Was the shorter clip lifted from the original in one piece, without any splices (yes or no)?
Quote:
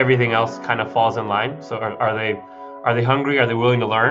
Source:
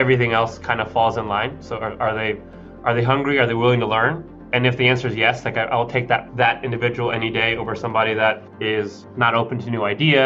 yes